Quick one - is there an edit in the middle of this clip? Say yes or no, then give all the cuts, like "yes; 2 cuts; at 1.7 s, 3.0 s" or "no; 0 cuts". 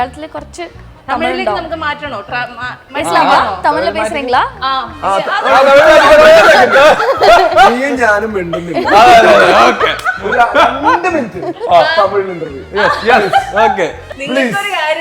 yes; 1 cut; at 14.1 s